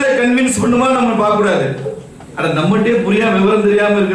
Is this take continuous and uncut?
yes; 0 cuts

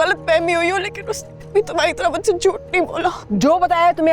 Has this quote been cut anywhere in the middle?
yes; 1 cut; at 3.2 s

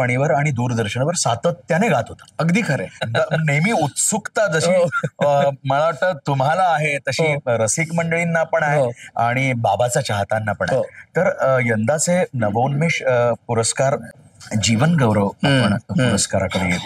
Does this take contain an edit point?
yes; 2 cuts; at 3.0 s, 14.1 s

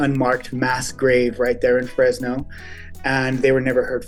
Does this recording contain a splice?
no; 0 cuts

